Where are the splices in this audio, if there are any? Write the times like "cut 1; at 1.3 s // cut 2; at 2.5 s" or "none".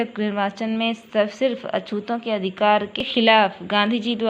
cut 1; at 2.9 s